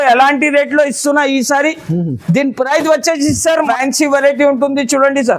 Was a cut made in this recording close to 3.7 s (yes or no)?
yes